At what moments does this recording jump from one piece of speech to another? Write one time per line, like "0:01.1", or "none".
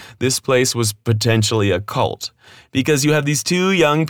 none